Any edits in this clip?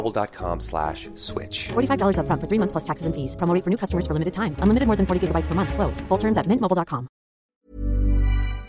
yes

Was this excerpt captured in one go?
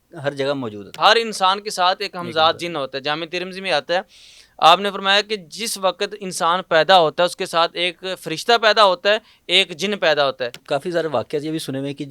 no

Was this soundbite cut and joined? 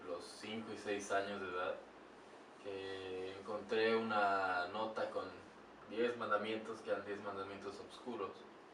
no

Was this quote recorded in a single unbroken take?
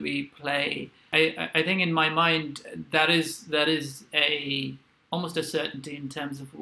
no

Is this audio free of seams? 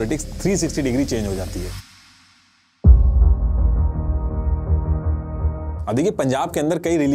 yes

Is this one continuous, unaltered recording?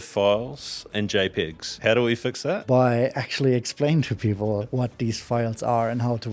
no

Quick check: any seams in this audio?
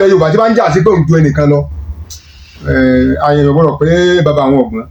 no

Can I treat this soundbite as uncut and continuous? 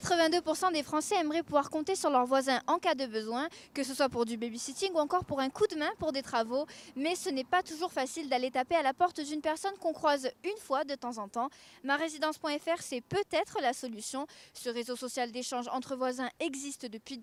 yes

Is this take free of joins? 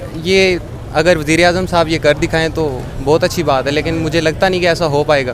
yes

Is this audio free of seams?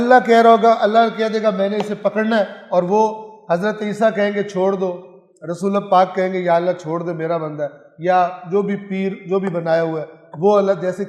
yes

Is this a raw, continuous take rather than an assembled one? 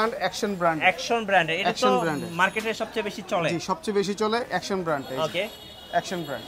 yes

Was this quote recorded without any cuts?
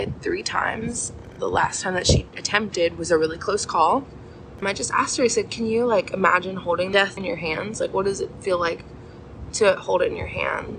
no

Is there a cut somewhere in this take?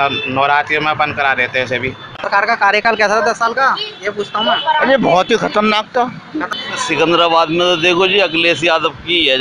yes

